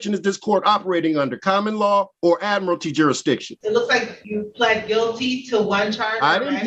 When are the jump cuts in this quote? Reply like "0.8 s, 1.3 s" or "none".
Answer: 2.1 s, 3.5 s, 4.2 s